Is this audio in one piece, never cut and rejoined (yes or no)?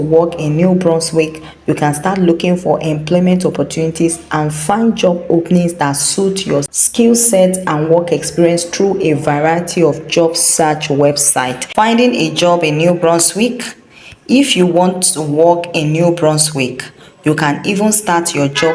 no